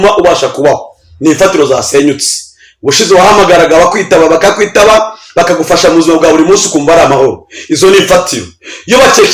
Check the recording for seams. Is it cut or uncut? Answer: uncut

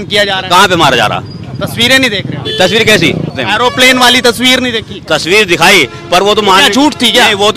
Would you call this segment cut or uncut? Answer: cut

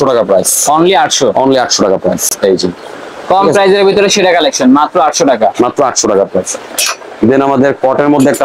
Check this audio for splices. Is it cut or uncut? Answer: uncut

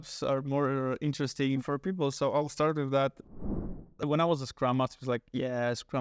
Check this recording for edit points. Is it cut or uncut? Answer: cut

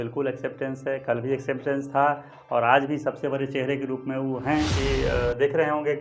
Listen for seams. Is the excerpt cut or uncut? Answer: cut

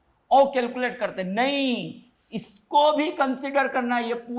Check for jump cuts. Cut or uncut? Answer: uncut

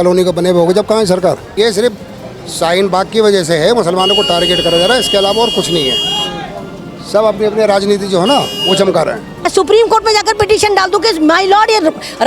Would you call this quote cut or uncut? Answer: cut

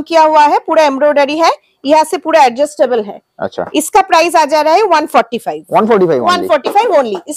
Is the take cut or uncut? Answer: uncut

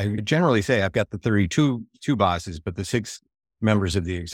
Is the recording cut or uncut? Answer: uncut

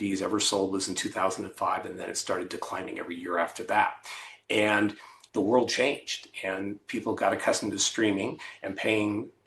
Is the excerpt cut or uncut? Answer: cut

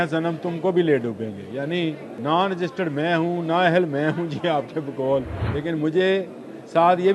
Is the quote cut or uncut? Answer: cut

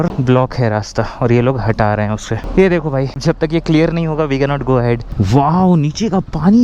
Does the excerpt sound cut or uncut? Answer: cut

